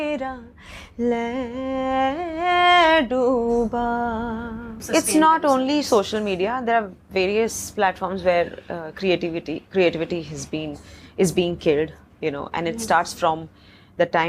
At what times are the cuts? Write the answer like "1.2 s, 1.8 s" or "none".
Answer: 4.8 s

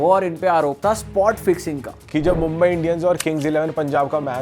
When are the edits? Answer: 2.0 s

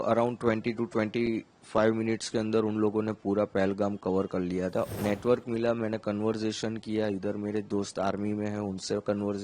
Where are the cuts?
4.9 s

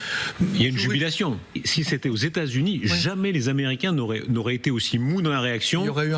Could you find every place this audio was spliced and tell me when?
1.6 s

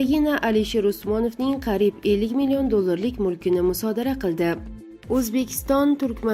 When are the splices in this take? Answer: 4.8 s

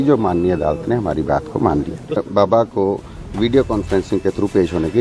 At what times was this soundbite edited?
2.2 s

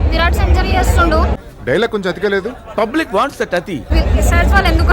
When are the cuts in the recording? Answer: 3.9 s

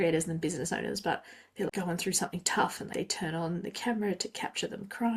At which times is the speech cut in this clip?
1.7 s, 2.8 s

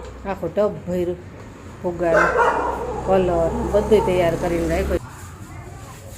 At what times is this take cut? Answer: 5.0 s

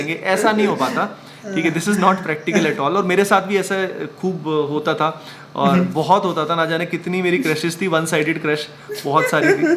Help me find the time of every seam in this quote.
none

